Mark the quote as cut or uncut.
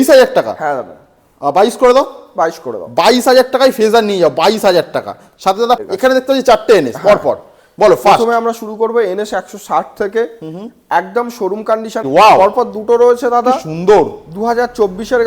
cut